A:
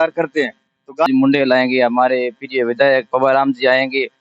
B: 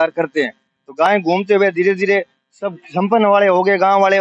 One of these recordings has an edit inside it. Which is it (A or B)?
A